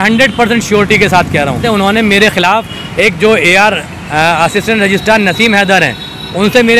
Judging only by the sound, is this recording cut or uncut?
cut